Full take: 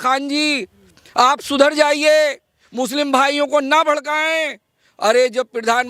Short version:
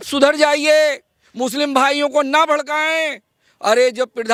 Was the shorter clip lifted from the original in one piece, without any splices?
yes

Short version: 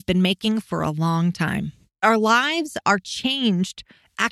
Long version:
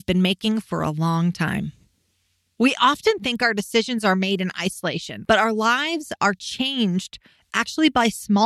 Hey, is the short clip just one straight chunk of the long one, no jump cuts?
no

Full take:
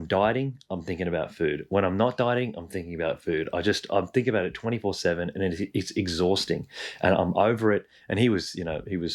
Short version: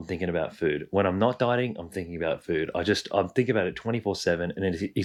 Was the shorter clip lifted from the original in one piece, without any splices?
yes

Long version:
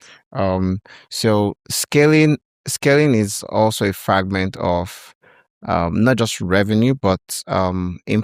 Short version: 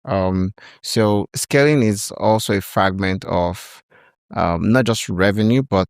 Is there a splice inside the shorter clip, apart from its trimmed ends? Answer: yes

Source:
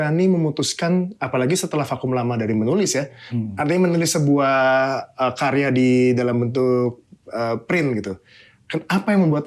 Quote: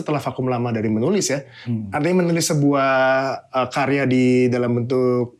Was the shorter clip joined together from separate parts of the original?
no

